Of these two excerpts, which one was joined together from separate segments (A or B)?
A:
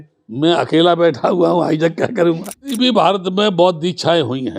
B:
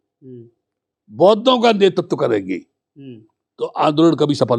A